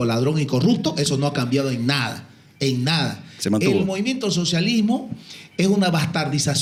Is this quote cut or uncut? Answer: uncut